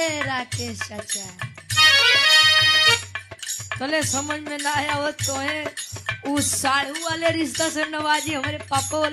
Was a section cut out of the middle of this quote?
no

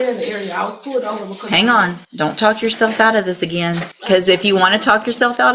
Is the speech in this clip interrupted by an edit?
yes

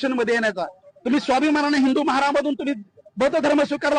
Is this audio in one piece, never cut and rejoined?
yes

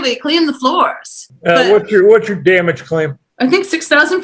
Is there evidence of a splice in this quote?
yes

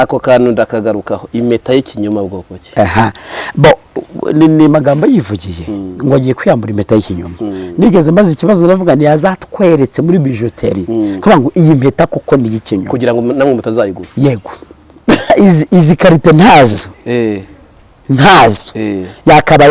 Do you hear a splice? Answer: yes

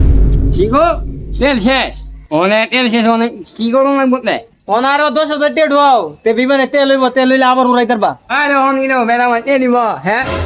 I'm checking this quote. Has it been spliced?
yes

